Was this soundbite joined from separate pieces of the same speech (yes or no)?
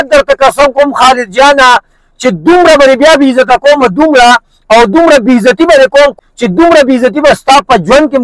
yes